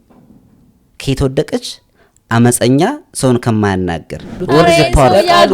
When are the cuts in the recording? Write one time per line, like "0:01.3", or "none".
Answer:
0:04.4